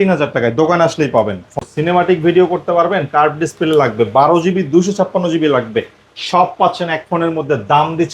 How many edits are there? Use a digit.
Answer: 1